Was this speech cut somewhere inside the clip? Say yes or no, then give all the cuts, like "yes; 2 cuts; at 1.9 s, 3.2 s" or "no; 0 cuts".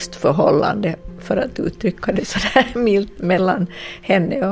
no; 0 cuts